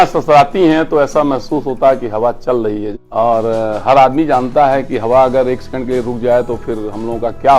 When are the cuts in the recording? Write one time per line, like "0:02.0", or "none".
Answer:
0:03.0